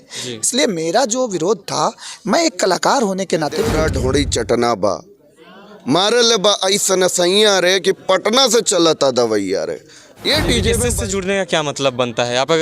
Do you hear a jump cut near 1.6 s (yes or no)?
no